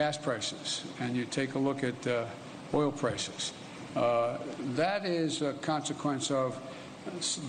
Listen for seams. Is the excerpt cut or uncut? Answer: uncut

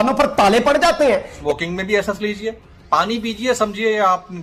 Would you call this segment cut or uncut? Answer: cut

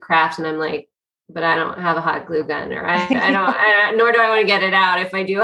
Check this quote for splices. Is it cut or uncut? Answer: uncut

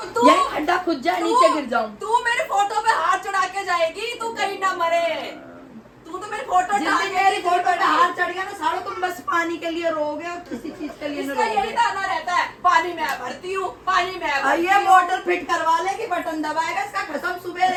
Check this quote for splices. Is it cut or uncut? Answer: uncut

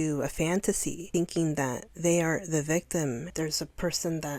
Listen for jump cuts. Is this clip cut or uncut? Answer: cut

